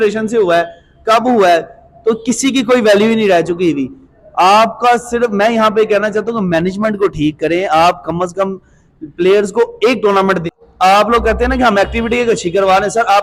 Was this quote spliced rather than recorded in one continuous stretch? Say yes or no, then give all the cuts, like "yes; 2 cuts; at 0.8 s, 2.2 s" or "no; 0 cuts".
yes; 1 cut; at 10.4 s